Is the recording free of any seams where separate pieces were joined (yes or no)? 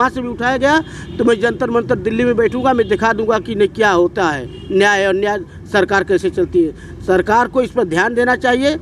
yes